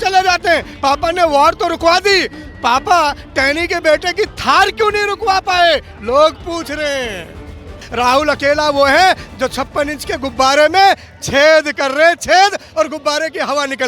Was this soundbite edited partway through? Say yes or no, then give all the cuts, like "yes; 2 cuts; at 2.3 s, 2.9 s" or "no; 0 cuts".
yes; 1 cut; at 7.8 s